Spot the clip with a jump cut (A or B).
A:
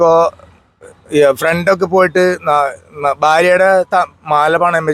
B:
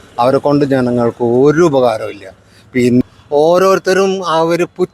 B